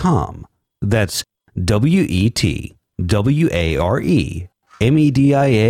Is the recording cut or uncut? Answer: uncut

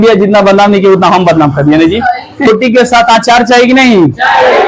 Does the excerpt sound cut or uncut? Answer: cut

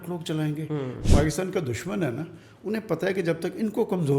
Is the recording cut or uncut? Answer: cut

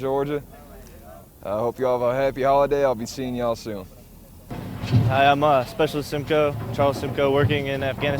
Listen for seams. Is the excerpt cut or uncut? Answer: cut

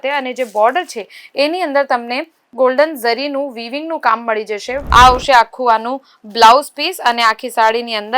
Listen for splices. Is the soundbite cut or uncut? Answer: cut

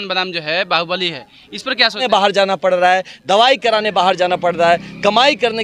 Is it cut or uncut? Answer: cut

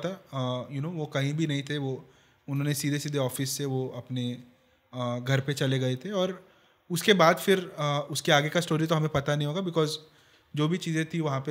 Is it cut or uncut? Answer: uncut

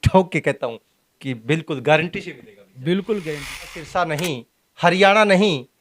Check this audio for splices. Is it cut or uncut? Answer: cut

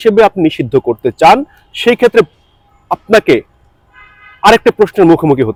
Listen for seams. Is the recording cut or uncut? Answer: uncut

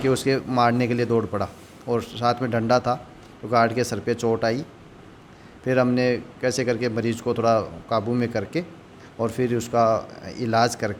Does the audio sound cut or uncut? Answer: uncut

